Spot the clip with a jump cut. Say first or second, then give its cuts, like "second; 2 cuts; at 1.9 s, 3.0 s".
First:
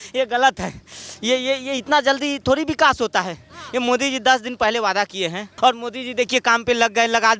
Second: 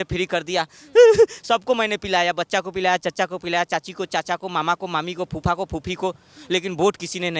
first; 1 cut; at 5.4 s